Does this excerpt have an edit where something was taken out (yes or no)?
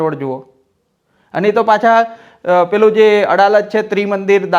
no